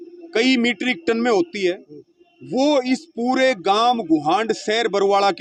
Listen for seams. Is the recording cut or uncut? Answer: uncut